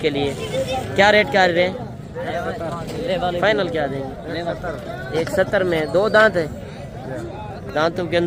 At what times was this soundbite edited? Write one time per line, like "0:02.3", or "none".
none